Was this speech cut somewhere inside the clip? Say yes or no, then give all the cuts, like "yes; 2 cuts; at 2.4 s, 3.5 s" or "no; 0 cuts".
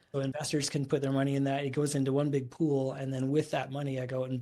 no; 0 cuts